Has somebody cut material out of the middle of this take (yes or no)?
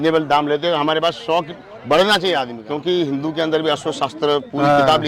yes